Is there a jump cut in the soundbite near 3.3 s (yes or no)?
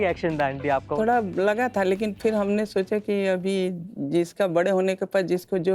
no